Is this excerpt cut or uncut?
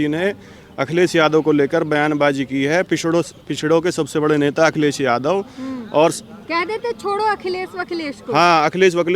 uncut